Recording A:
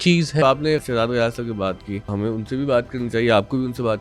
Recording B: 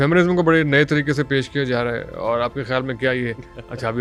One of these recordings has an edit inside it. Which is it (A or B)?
A